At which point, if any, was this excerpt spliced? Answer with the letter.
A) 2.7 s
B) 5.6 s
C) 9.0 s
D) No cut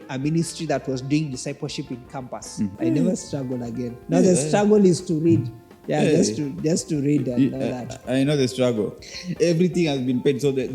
A